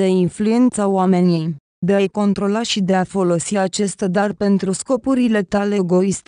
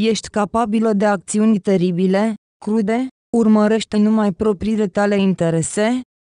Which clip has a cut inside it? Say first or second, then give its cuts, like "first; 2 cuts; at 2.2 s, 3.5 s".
second; 1 cut; at 2.9 s